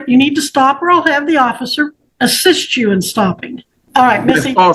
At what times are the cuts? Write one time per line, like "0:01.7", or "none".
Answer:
0:02.0
0:03.7